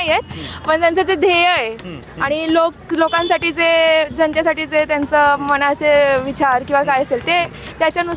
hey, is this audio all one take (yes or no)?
yes